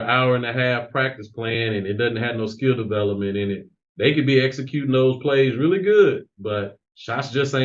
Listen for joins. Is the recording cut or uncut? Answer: uncut